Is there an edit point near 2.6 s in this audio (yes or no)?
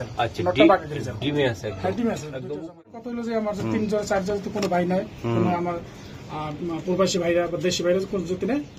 yes